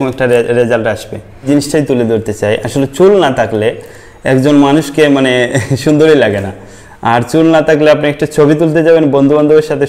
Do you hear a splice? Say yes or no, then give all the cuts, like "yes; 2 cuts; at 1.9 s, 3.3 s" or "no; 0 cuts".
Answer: yes; 1 cut; at 1.5 s